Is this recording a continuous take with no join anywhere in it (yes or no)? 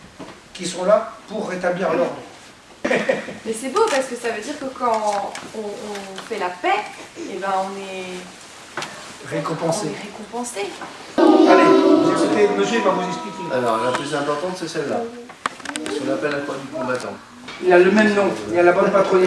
no